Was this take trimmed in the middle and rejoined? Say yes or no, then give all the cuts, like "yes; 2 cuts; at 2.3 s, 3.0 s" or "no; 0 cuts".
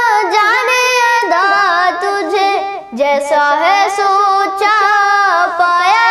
no; 0 cuts